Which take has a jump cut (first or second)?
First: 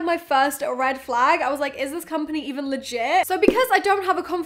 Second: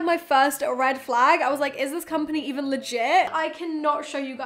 second